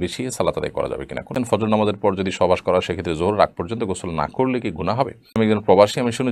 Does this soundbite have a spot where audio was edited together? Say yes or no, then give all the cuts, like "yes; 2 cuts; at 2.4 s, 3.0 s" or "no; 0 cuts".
yes; 2 cuts; at 1.3 s, 5.4 s